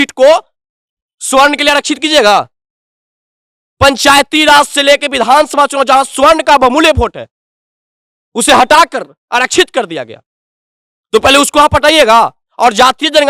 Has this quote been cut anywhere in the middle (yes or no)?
no